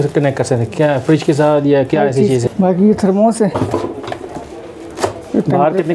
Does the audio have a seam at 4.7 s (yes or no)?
no